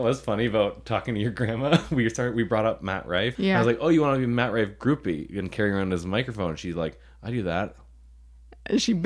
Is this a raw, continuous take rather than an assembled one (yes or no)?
no